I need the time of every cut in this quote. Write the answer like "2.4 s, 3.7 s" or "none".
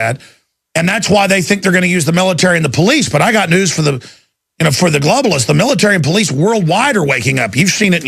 none